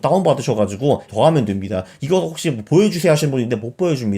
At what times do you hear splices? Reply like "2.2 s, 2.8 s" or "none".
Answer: 1.1 s